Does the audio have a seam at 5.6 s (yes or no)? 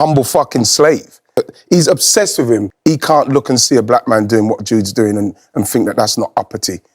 no